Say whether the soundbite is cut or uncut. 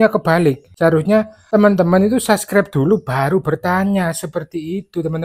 cut